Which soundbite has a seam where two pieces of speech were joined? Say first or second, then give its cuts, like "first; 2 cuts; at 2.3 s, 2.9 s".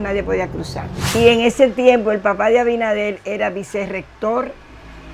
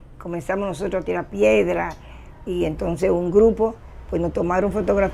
first; 1 cut; at 1.1 s